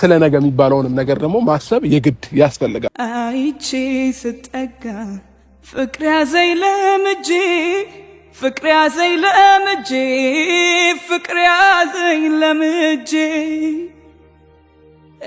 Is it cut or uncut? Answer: cut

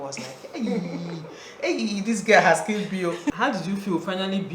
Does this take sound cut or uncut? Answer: cut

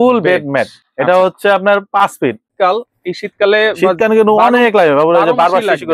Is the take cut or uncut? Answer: cut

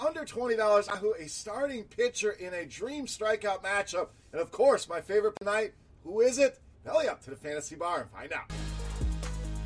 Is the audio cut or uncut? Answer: cut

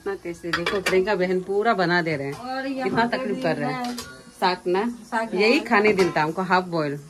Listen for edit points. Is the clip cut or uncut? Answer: uncut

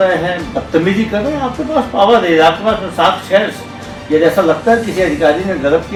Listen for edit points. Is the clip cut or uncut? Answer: uncut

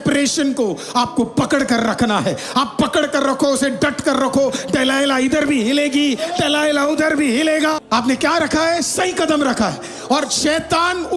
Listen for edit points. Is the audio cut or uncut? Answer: cut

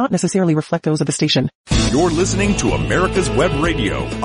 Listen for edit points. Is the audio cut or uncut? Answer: cut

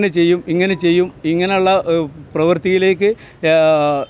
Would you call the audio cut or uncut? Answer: uncut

